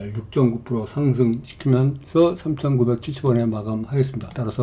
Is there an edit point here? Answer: no; 0 cuts

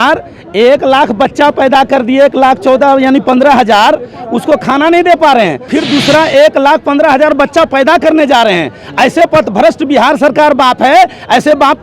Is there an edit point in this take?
yes; 1 cut; at 5.7 s

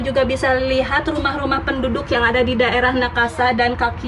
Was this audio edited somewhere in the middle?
no; 0 cuts

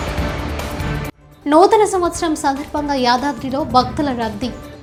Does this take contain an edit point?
no; 0 cuts

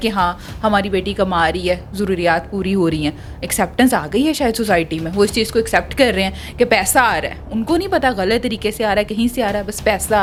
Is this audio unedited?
yes; 0 cuts

